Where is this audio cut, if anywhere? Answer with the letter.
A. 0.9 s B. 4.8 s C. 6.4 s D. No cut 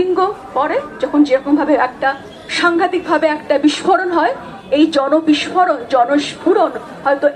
D